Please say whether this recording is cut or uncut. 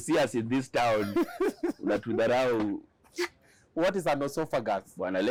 uncut